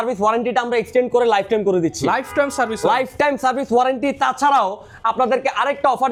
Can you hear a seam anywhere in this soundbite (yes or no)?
no